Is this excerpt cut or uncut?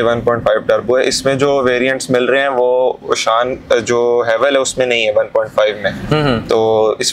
uncut